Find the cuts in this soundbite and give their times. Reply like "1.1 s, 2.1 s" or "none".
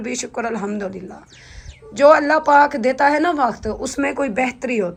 none